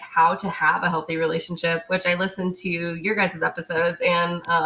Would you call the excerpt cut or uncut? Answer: uncut